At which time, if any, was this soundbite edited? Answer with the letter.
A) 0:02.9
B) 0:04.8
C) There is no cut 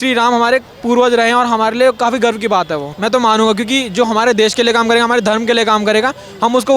A